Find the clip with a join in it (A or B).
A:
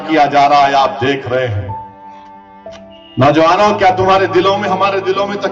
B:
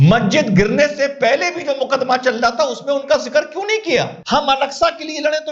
B